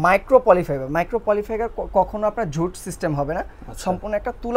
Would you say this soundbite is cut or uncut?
uncut